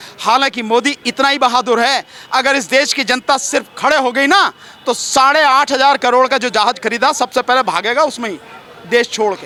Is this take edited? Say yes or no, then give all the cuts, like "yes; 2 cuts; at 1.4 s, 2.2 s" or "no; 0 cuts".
no; 0 cuts